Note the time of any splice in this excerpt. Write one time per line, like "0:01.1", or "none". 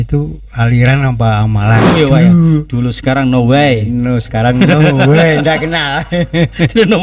0:01.8